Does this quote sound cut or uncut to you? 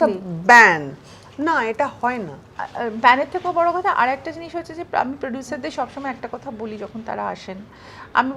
uncut